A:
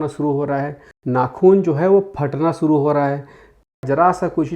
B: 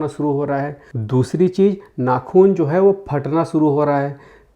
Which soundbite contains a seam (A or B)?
A